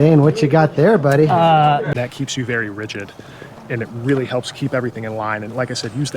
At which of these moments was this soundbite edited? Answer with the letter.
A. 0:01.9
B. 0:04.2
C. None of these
A